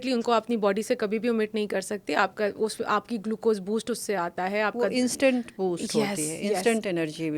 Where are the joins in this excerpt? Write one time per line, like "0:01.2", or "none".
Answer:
none